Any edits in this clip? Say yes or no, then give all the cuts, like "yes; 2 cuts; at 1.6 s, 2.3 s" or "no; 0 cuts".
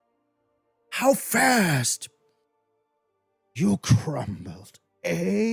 no; 0 cuts